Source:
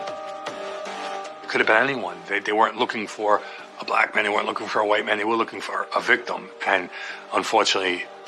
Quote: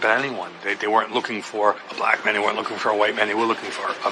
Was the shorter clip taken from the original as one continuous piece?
no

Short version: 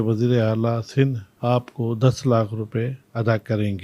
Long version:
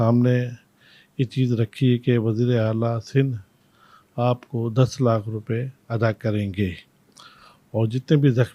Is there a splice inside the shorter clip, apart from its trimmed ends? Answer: yes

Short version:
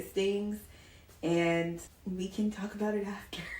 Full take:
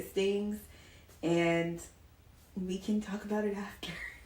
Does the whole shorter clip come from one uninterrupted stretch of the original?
no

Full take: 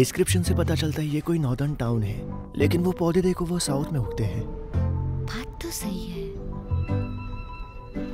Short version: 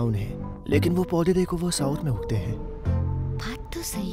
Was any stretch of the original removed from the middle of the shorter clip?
no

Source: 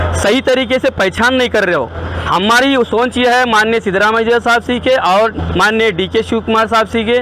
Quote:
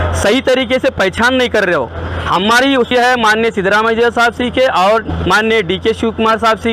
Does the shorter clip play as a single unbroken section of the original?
no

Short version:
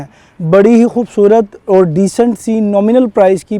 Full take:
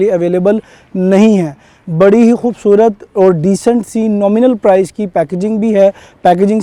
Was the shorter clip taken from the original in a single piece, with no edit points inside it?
yes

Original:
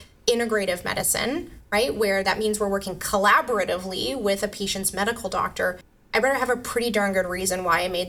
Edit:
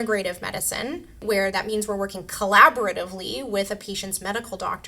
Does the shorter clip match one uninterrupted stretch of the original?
no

